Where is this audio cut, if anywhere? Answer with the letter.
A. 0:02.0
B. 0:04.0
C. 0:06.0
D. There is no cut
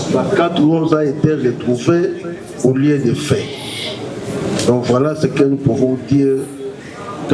D